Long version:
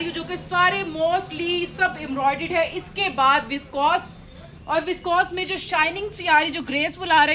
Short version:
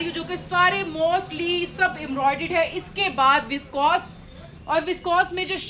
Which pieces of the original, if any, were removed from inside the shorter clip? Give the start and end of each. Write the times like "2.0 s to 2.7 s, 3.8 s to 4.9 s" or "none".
none